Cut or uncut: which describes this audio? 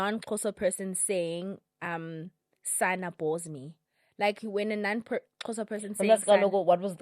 uncut